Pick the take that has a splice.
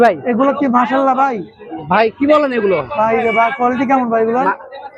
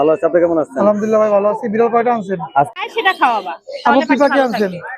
second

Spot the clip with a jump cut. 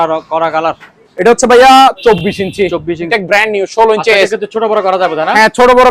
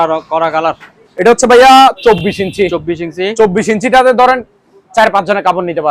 first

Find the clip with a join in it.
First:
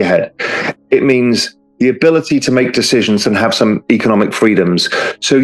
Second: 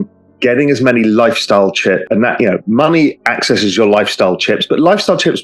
second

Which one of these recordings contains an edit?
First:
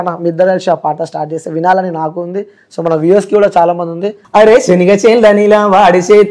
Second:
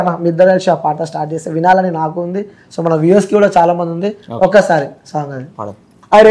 first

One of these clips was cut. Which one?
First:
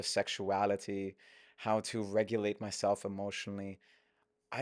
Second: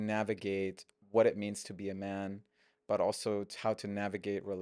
second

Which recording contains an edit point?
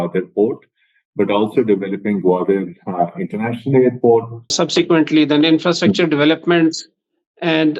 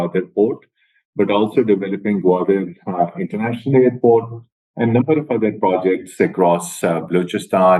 first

